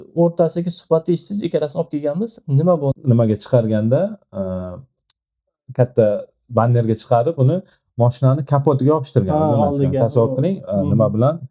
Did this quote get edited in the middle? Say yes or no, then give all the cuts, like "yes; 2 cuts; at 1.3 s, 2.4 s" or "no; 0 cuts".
yes; 1 cut; at 2.9 s